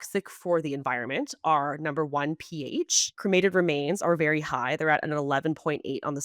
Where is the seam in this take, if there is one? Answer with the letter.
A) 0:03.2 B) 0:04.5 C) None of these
A